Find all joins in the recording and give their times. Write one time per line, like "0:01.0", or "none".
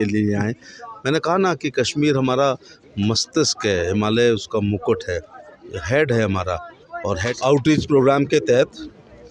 0:07.3